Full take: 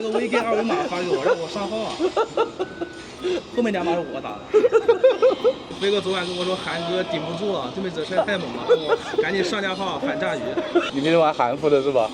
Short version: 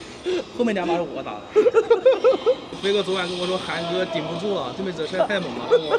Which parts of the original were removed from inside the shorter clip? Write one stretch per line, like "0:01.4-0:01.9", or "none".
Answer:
none